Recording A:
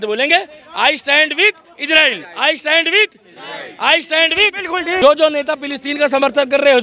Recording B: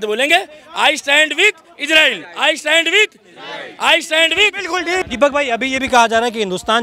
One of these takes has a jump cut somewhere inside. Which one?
A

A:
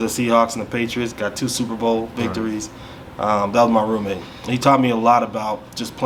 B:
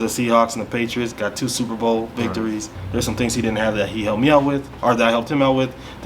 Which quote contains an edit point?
B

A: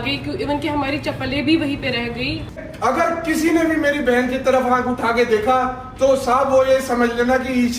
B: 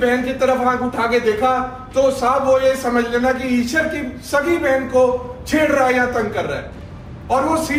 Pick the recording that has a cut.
A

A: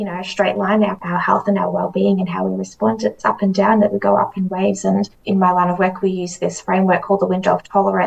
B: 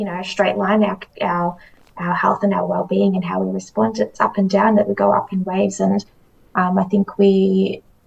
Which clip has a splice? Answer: A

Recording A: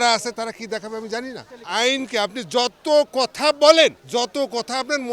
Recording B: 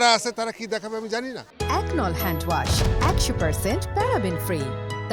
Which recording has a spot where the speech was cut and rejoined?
A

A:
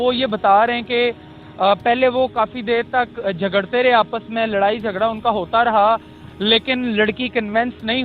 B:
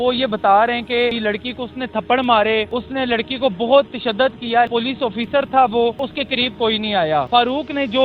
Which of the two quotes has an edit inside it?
B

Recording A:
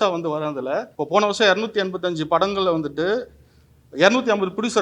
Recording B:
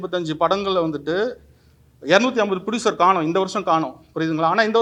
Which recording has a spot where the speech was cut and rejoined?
A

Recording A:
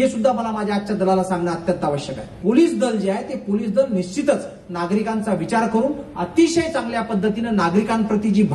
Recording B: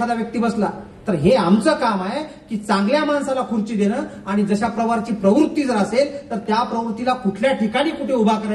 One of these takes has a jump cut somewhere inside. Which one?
A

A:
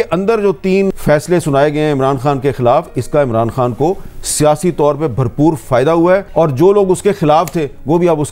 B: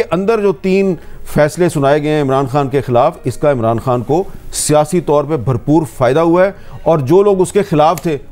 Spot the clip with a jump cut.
A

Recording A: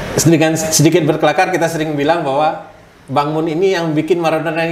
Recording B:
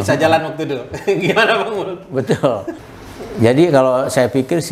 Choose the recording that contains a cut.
B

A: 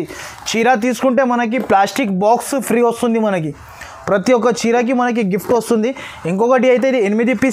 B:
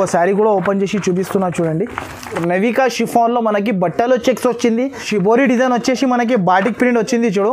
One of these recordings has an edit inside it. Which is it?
B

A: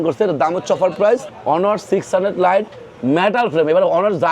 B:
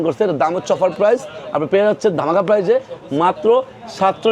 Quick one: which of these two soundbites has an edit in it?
A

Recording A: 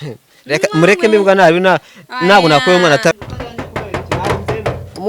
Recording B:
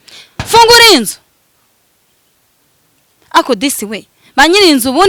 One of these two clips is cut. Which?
A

